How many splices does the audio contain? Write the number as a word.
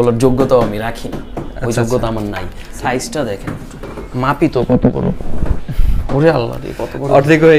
one